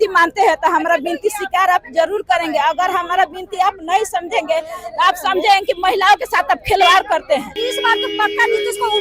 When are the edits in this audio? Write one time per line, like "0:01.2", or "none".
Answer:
0:07.5